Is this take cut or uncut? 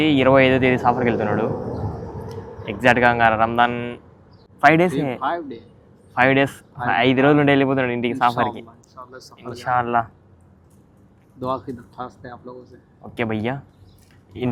uncut